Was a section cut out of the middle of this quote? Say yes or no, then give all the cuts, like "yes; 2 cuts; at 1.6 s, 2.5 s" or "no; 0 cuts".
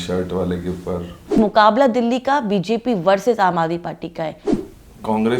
yes; 2 cuts; at 1.4 s, 4.4 s